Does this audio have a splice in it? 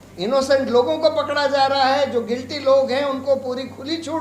no; 0 cuts

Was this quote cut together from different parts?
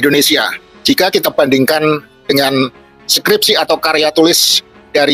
no; 0 cuts

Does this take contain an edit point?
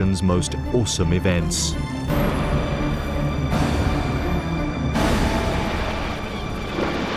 no; 0 cuts

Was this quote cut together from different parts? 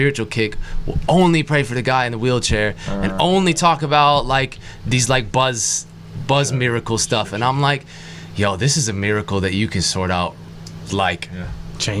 no; 0 cuts

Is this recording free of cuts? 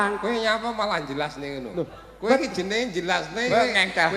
yes; 0 cuts

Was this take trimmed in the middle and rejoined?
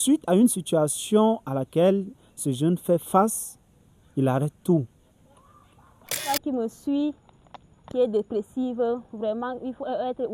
yes; 1 cut; at 6.3 s

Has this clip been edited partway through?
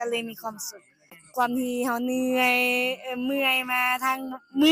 yes; 1 cut; at 1.2 s

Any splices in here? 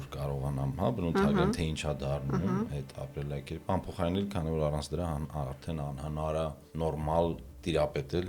no; 0 cuts

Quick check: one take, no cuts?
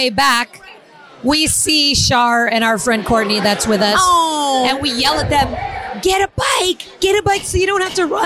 yes; 0 cuts

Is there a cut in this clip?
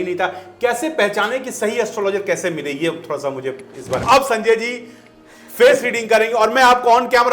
yes; 1 cut; at 4.0 s

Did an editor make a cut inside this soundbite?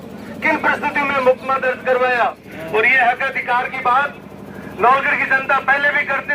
yes; 1 cut; at 2.5 s

